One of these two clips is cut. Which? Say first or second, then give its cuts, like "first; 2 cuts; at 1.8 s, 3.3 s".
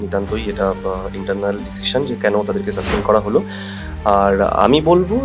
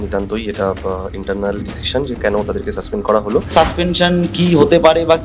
second; 1 cut; at 3.5 s